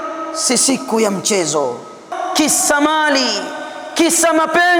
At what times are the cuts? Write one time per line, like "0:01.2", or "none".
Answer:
0:02.2